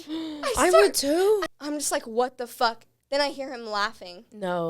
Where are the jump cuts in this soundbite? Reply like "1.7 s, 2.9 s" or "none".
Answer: none